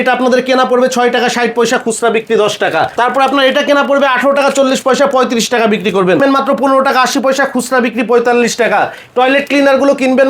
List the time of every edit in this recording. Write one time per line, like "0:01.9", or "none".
0:02.9
0:06.2